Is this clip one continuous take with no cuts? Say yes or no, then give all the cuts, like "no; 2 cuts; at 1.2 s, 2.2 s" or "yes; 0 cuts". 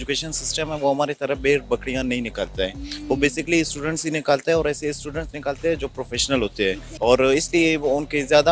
yes; 0 cuts